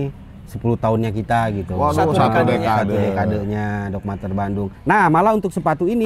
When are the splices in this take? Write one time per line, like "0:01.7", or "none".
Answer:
0:04.7